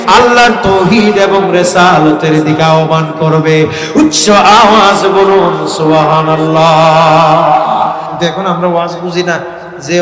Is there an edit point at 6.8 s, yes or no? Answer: no